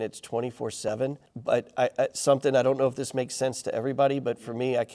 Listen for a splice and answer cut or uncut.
cut